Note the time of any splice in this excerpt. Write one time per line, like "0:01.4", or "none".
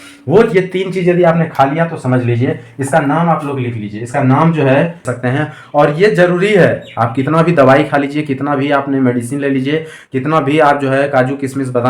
0:05.1